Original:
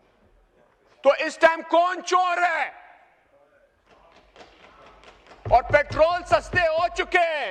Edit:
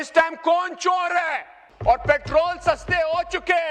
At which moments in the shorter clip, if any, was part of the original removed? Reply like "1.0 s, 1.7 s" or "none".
1.2 s